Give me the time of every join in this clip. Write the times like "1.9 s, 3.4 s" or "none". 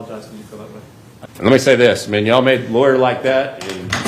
1.2 s